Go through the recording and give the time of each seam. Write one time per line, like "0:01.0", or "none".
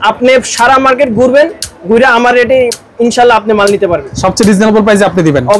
0:04.1